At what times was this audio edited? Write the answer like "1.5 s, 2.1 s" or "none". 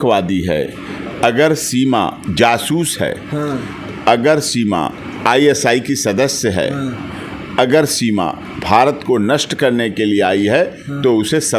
2.2 s, 5.0 s, 8.5 s